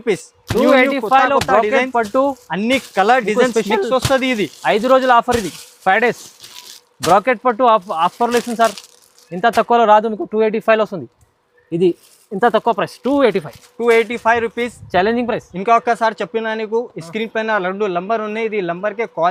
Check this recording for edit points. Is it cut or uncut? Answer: uncut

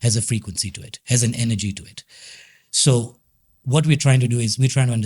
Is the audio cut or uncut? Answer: uncut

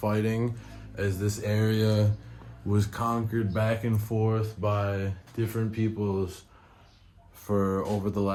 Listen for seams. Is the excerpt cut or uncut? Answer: uncut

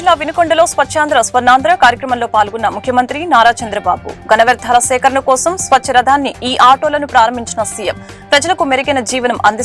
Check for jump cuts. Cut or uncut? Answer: uncut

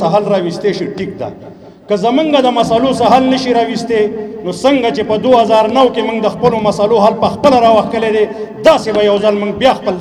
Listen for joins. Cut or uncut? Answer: uncut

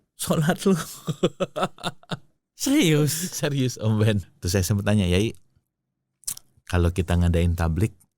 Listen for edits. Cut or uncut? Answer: cut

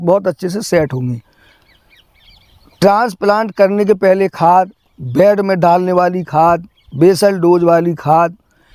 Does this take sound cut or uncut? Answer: uncut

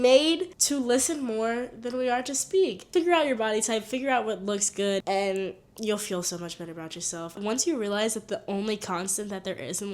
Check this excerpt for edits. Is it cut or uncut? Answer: cut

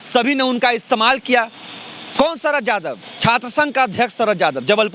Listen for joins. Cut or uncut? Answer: uncut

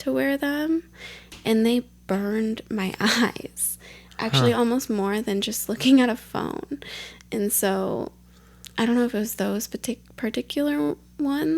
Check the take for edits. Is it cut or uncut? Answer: uncut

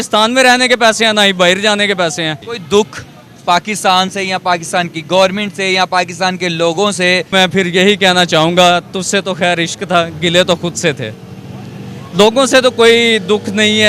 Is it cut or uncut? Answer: cut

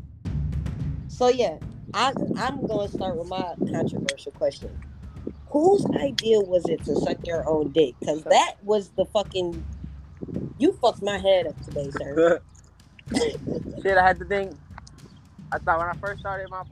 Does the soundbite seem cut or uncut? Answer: cut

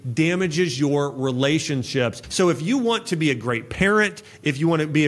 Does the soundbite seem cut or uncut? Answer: cut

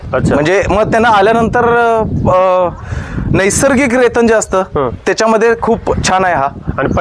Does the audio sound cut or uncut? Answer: uncut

